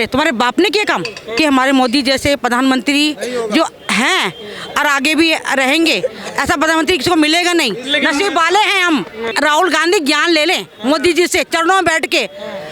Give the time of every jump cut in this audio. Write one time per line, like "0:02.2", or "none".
0:01.2
0:09.3